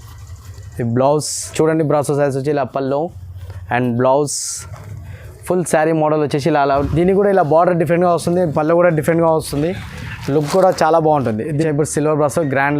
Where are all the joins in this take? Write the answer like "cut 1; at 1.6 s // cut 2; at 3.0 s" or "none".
cut 1; at 1.5 s // cut 2; at 6.8 s // cut 3; at 11.6 s